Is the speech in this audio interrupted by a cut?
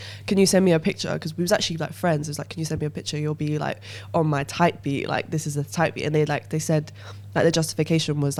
no; 0 cuts

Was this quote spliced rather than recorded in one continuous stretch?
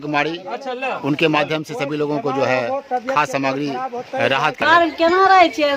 yes; 1 cut; at 4.6 s

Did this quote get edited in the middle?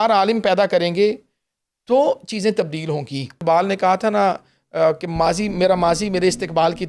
yes; 1 cut; at 3.4 s

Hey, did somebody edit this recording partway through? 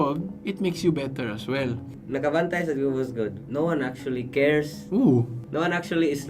yes; 3 cuts; at 1.9 s, 3.4 s, 5.4 s

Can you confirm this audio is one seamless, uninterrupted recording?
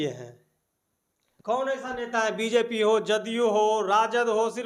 yes; 0 cuts

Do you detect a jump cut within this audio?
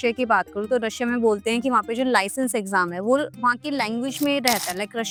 no; 0 cuts

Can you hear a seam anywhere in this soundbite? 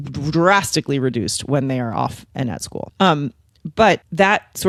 no; 0 cuts

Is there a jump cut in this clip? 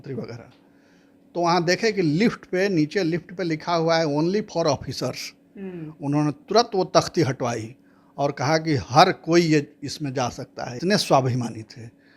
yes; 1 cut; at 10.8 s

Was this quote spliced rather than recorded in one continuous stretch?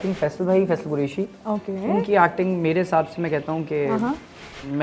no; 0 cuts

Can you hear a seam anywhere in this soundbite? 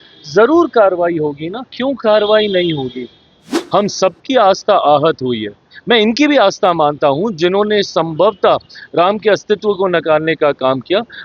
yes; 1 cut; at 3.5 s

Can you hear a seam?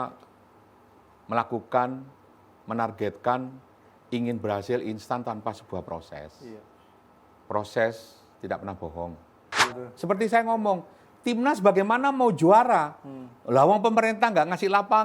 yes; 1 cut; at 9.7 s

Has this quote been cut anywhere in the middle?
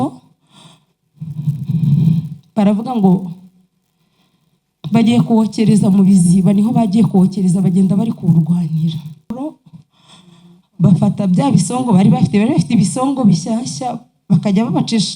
yes; 1 cut; at 9.3 s

